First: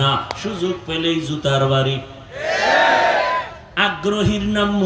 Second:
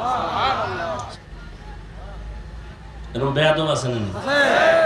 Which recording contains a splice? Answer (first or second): second